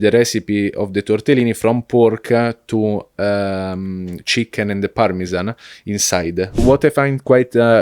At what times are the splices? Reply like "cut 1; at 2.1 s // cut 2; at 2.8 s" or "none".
cut 1; at 6.6 s